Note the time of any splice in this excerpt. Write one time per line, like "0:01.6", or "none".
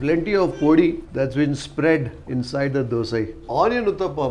0:03.4